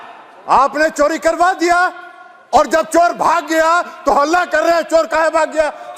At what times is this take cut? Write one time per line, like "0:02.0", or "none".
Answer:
none